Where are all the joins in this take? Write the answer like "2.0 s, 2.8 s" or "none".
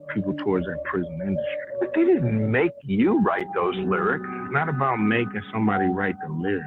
1.9 s